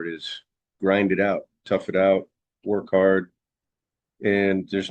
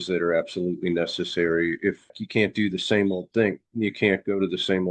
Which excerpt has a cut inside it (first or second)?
second